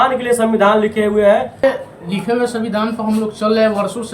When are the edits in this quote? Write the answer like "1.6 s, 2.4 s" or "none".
1.6 s